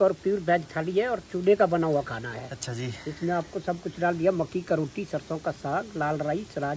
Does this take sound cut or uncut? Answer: uncut